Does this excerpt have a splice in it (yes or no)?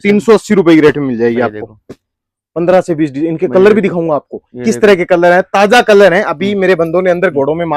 no